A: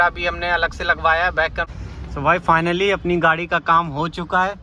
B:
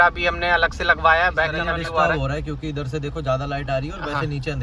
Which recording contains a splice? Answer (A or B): A